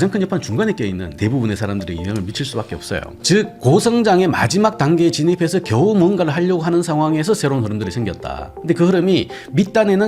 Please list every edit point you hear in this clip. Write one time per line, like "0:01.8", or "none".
0:01.1
0:03.2